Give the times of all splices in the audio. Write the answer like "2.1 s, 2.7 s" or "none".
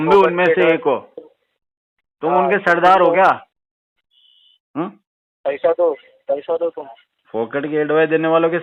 none